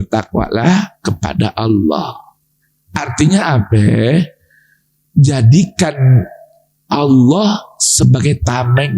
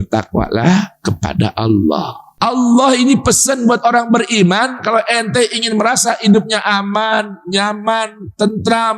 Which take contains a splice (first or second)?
second